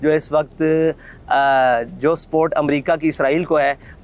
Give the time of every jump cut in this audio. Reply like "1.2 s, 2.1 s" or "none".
none